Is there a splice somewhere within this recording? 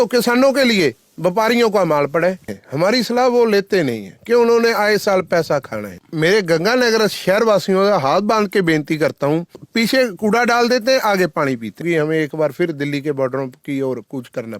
yes; 4 cuts; at 2.6 s, 6.0 s, 9.6 s, 11.8 s

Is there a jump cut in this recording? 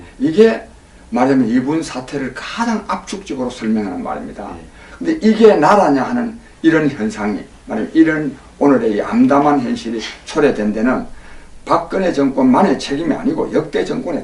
yes; 1 cut; at 4.2 s

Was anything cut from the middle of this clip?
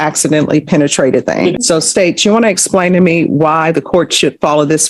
yes; 1 cut; at 1.6 s

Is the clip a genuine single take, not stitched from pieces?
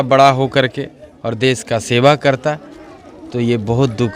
yes; 0 cuts

